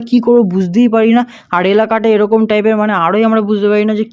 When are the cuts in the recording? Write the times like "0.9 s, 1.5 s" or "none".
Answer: none